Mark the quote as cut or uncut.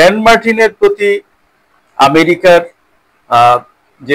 uncut